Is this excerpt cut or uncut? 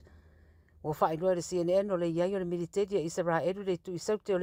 uncut